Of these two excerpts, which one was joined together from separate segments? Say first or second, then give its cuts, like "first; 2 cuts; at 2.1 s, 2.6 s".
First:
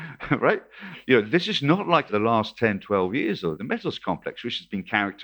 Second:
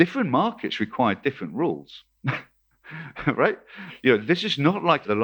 first; 1 cut; at 3.6 s